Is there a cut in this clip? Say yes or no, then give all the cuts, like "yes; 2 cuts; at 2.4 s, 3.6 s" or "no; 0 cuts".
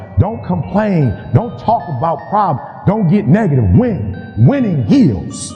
no; 0 cuts